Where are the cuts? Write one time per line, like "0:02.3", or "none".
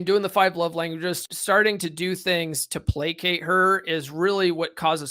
0:01.2